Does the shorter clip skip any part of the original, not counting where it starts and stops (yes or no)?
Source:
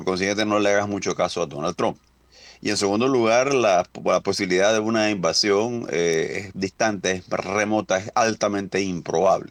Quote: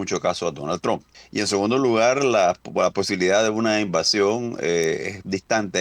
yes